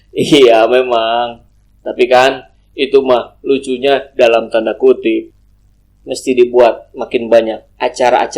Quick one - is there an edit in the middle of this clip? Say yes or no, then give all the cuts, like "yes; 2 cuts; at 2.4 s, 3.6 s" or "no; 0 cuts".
yes; 1 cut; at 5.2 s